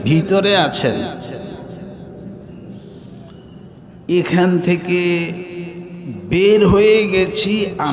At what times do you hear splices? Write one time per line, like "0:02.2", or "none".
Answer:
none